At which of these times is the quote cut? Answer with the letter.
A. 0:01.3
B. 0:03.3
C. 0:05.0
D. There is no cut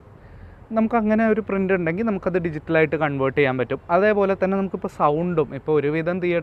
D